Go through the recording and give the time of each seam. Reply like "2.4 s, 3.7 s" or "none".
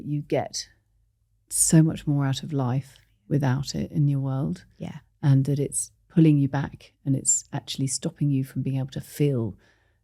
none